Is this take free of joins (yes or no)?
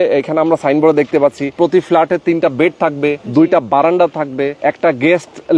no